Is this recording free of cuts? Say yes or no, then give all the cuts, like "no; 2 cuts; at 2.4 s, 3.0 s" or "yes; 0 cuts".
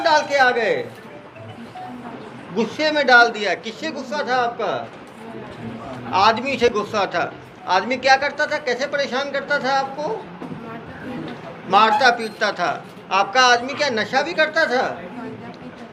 yes; 0 cuts